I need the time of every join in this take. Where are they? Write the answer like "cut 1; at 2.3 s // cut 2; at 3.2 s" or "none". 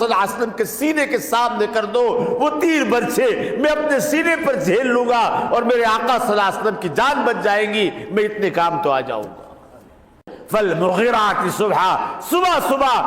cut 1; at 10.3 s